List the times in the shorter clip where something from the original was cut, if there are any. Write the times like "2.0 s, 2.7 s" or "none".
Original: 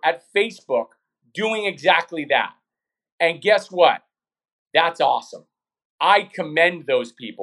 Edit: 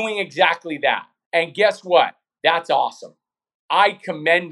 1.1 s, 2.2 s

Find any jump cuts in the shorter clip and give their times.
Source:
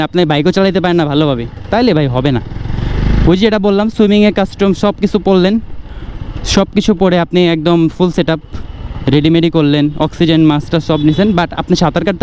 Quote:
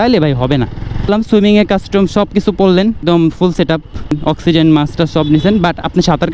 1.1 s, 3.0 s, 4.2 s

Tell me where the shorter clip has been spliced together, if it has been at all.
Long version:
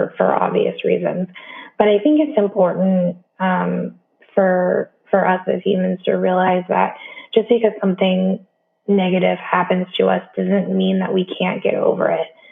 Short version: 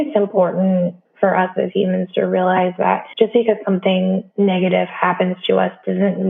1.1 s, 3.1 s, 4.3 s

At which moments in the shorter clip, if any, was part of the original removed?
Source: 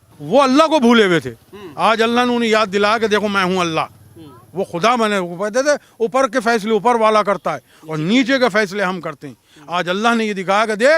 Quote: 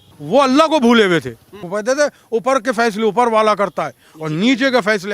1.6 s

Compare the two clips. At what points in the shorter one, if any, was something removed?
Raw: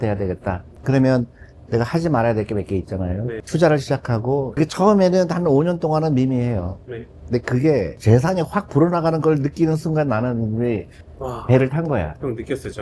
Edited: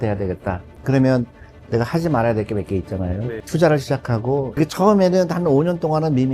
none

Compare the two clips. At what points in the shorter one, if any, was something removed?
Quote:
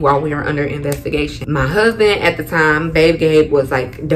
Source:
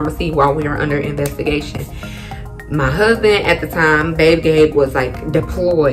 1.4 s

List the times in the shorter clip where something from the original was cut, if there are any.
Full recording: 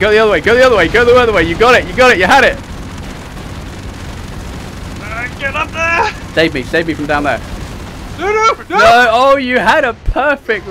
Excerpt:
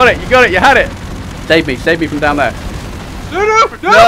1.3 s

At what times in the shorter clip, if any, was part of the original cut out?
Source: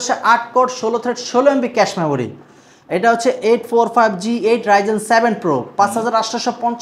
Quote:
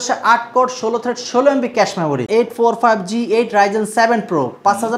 2.3 s

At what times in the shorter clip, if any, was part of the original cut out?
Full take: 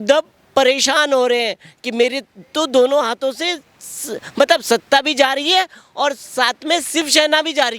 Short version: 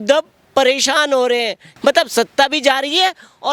1.6 s

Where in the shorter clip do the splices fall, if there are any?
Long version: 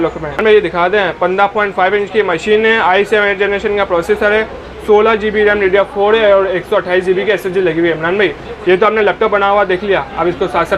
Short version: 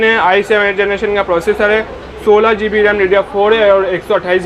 none

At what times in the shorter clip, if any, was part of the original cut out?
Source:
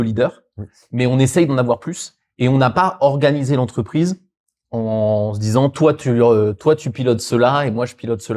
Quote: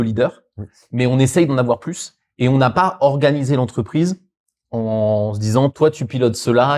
5.7 s

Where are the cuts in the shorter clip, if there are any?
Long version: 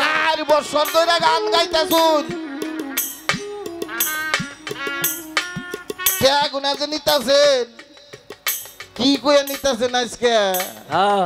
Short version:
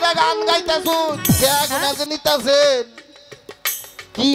1.3 s

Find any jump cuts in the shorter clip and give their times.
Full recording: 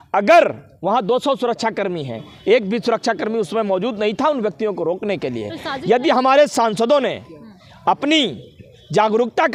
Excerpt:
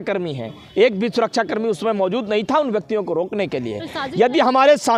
none

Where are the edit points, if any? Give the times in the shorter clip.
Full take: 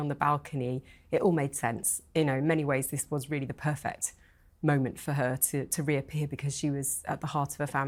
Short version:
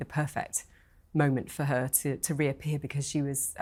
none

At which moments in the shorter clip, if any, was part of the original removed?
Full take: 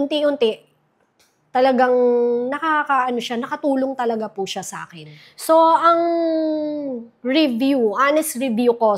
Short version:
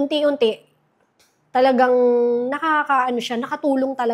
none

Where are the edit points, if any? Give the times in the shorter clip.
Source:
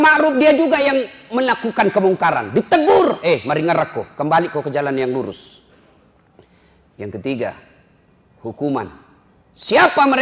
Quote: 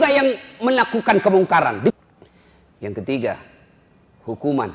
2.0 s

